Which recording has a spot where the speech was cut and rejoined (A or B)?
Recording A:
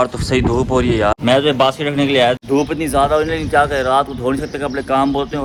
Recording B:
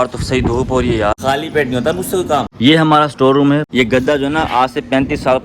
B